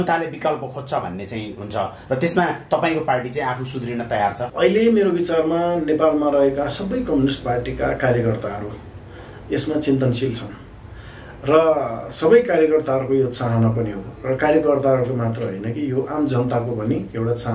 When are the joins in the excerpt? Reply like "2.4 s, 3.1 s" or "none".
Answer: 4.5 s